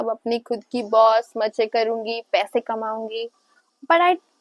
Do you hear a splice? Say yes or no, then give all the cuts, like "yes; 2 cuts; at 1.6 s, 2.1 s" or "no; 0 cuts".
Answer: no; 0 cuts